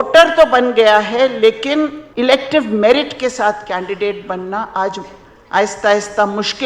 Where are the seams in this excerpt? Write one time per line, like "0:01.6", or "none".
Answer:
0:02.0